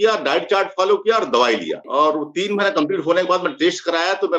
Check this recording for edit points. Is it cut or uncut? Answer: cut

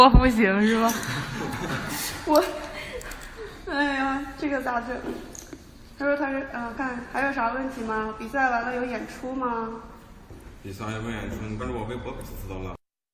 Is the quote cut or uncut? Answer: cut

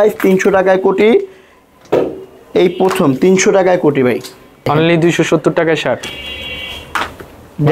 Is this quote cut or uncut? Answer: cut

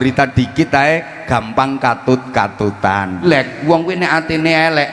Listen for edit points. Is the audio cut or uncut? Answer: cut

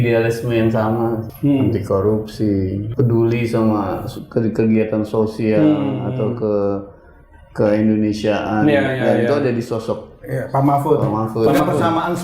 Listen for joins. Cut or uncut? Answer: cut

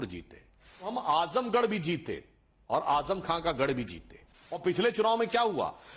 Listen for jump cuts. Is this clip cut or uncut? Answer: cut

